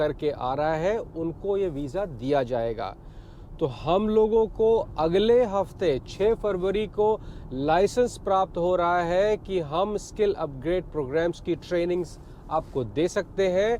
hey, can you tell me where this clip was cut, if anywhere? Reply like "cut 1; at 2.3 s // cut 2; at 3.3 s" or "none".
none